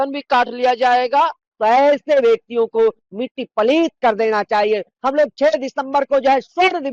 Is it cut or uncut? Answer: cut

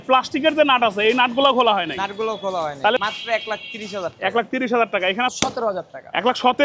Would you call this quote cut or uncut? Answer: cut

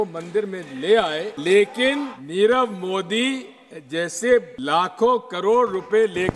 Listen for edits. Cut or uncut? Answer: cut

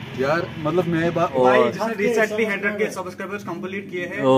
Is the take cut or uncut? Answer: cut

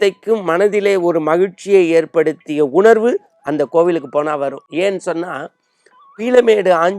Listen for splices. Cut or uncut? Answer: uncut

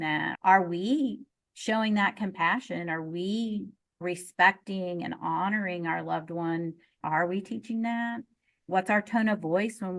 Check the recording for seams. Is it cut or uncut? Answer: uncut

